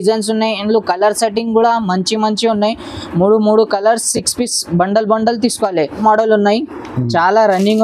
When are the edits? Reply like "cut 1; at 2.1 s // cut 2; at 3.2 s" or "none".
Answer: cut 1; at 6.0 s